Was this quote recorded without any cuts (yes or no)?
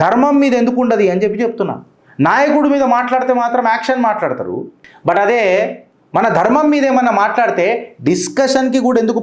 yes